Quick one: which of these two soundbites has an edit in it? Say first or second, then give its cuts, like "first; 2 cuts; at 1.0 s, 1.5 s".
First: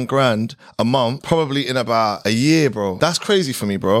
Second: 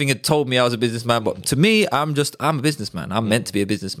first; 3 cuts; at 1.2 s, 2.2 s, 2.9 s